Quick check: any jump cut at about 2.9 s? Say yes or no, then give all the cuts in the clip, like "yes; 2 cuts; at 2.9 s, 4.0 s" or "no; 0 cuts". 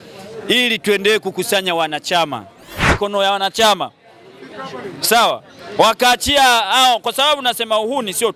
yes; 1 cut; at 2.9 s